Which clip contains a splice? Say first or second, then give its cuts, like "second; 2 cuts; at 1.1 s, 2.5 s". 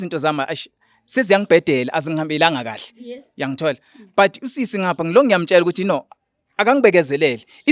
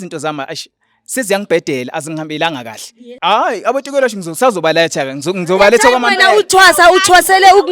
second; 1 cut; at 3.1 s